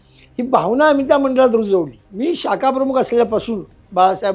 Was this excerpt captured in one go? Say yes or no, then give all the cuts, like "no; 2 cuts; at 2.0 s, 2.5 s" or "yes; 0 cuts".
no; 1 cut; at 2.0 s